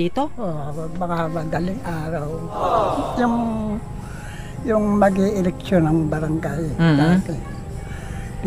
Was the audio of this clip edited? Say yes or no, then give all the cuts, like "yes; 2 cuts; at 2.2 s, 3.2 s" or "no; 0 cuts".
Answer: no; 0 cuts